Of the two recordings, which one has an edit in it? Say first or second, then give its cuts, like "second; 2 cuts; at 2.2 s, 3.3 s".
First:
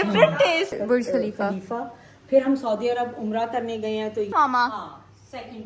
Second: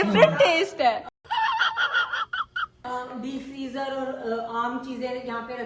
first; 2 cuts; at 0.8 s, 4.3 s